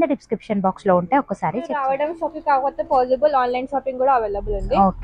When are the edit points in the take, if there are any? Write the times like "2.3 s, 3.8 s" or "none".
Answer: 1.7 s

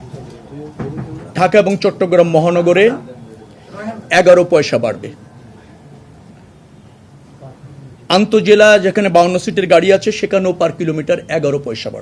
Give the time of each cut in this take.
none

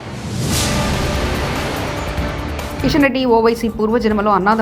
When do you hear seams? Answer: 2.8 s

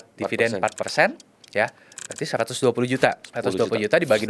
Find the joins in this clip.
3.3 s

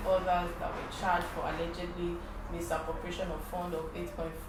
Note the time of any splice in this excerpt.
none

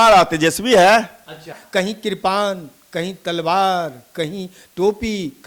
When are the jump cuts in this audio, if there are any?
1.6 s

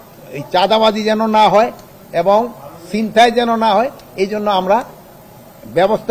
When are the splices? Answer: none

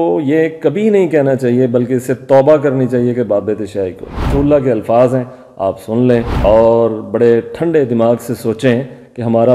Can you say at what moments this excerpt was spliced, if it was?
4.2 s

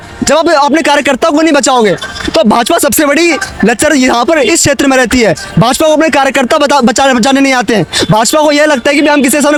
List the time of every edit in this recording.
none

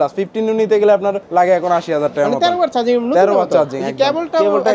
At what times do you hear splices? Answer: 1.2 s

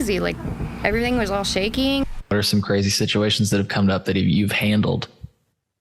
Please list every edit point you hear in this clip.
2.3 s

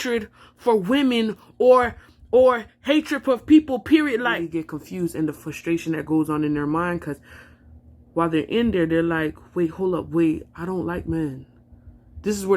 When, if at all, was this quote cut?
4.5 s

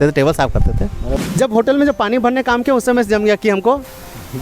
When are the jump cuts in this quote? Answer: 1.1 s

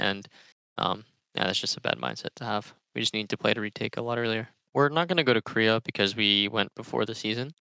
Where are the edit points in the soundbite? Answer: 4.6 s

